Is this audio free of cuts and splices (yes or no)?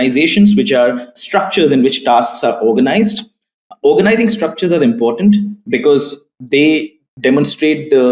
yes